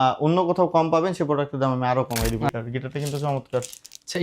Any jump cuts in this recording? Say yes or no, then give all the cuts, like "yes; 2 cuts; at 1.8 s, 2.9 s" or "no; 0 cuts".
yes; 1 cut; at 2.5 s